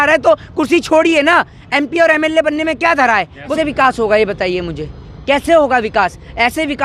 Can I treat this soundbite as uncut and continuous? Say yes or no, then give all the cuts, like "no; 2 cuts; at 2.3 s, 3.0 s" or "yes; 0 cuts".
no; 1 cut; at 3.5 s